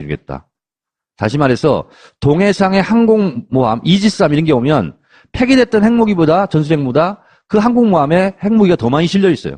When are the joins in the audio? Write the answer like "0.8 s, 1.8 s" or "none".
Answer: none